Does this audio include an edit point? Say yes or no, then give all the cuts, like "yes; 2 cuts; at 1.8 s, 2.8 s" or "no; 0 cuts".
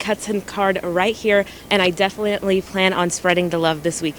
no; 0 cuts